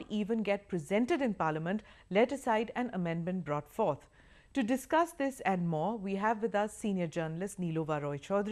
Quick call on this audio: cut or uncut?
uncut